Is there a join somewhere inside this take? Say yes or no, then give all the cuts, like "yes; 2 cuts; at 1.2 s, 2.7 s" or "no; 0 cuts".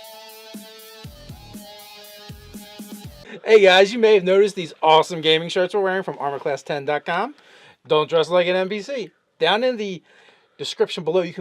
yes; 1 cut; at 3.2 s